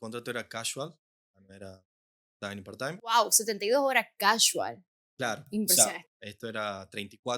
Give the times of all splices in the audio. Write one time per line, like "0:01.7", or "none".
0:06.0